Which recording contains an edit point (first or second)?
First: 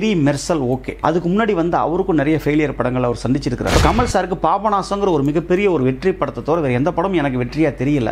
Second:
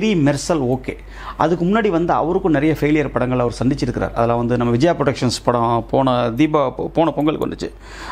first